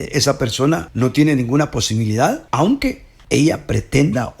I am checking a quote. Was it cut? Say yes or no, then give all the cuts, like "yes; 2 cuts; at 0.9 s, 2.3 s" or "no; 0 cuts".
yes; 3 cuts; at 0.9 s, 2.4 s, 3.1 s